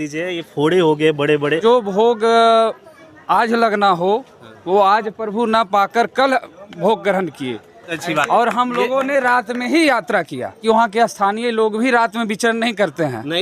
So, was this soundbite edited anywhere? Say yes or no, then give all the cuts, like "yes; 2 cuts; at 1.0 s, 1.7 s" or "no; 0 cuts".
yes; 3 cuts; at 1.6 s, 7.9 s, 10.6 s